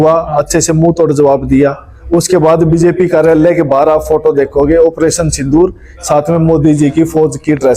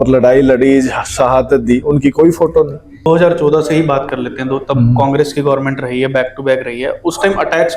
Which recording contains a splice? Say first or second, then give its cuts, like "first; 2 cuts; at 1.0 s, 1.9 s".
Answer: second; 1 cut; at 3.1 s